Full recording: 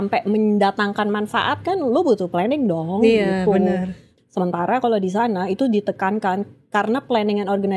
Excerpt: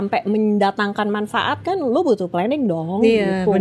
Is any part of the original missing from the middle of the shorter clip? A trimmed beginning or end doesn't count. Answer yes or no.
no